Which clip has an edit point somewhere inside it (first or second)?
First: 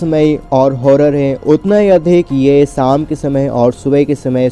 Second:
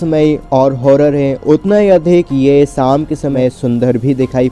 second